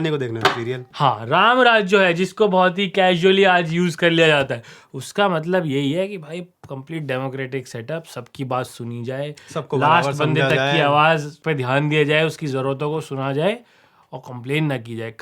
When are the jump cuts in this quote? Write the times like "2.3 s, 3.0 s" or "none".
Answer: 0.9 s, 11.3 s